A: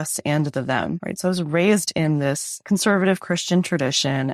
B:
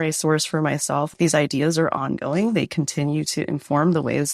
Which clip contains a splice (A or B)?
B